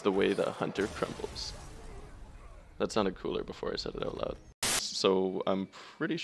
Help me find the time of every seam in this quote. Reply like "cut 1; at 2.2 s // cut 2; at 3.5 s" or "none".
cut 1; at 4.8 s